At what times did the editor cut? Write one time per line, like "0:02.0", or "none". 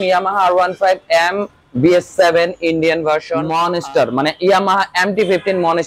0:03.4